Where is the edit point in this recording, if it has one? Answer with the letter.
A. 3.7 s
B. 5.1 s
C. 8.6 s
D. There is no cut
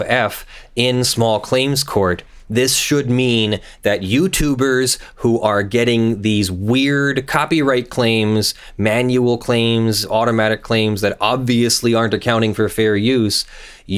D